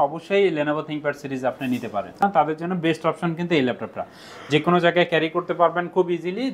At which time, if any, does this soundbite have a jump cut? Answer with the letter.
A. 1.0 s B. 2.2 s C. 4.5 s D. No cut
B